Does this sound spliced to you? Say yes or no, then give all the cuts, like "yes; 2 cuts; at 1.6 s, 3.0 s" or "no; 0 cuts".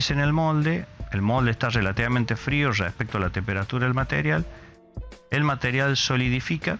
no; 0 cuts